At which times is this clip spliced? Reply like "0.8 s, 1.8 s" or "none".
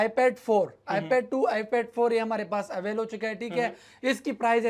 none